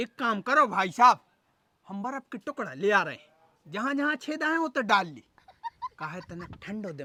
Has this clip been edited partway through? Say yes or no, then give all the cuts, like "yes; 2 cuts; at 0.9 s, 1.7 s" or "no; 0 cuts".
no; 0 cuts